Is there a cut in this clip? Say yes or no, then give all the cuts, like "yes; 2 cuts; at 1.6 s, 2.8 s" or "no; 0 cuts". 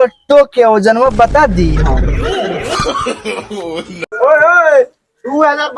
no; 0 cuts